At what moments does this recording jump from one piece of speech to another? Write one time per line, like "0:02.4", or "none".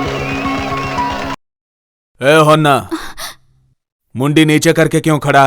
0:01.4